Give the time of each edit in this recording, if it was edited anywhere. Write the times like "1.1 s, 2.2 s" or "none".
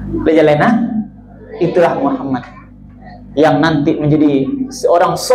none